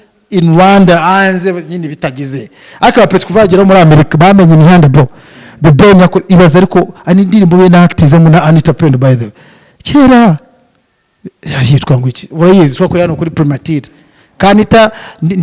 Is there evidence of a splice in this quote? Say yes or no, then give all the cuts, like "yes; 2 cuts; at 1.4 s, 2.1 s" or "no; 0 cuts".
no; 0 cuts